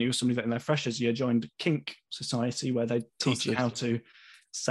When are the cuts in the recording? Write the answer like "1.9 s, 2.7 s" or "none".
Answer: none